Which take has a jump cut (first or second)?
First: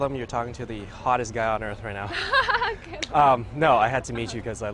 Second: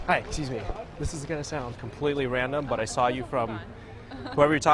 first